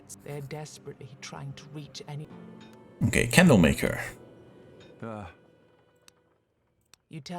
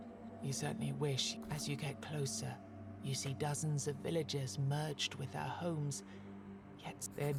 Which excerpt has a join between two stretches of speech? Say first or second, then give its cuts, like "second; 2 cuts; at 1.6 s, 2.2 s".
first; 1 cut; at 2.2 s